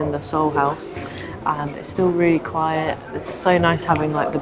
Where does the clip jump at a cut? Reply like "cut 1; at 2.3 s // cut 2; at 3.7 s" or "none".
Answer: none